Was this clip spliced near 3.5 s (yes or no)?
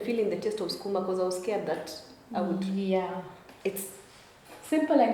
yes